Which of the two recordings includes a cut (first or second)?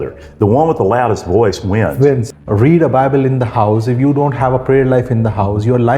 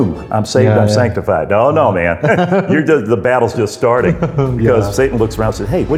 first